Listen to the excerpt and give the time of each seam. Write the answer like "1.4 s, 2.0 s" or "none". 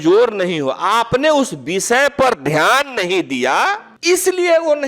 3.9 s